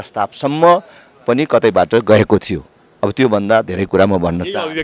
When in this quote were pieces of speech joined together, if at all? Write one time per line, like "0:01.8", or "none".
none